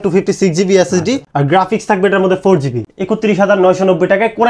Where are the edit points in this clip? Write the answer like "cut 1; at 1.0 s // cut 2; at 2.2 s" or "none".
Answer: cut 1; at 2.8 s